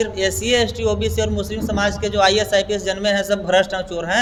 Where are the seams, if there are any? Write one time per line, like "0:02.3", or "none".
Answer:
none